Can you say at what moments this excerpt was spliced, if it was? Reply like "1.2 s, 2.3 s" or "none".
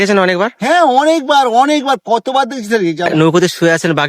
3.1 s